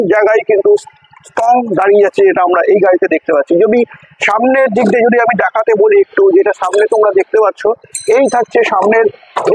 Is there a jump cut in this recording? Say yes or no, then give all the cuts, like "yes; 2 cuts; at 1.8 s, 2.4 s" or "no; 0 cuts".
no; 0 cuts